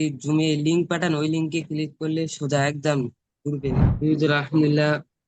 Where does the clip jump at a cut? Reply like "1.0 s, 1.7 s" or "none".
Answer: 3.9 s